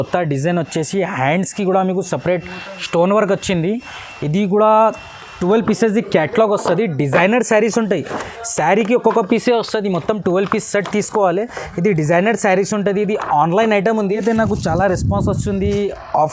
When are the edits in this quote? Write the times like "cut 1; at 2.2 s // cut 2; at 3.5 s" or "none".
cut 1; at 5.4 s // cut 2; at 14.1 s